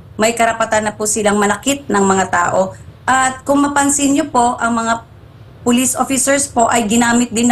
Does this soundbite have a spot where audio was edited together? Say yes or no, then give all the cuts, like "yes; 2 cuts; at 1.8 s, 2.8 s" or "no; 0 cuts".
no; 0 cuts